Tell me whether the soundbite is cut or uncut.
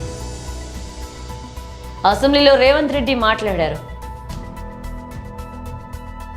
uncut